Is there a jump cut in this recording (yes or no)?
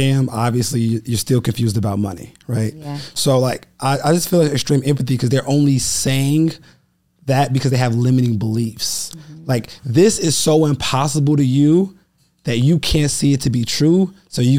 no